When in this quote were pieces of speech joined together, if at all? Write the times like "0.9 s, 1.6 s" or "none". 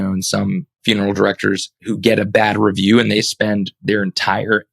0.8 s, 1.7 s